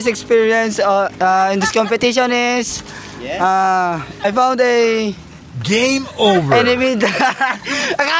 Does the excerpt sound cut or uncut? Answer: cut